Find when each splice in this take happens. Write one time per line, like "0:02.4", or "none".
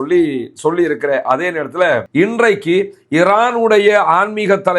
0:02.1